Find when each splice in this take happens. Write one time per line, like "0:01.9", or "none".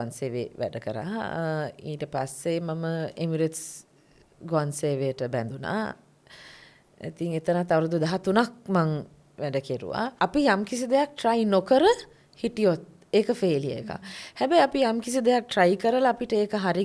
0:10.1